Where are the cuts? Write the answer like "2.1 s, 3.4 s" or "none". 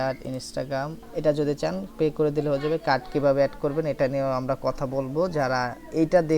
1.0 s